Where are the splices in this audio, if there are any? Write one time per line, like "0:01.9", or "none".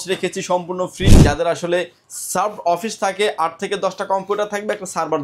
0:01.2